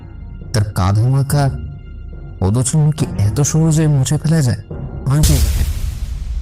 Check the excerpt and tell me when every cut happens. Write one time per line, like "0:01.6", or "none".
0:05.4